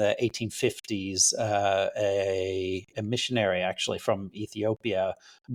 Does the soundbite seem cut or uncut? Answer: uncut